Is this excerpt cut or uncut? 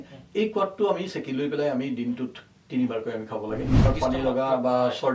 cut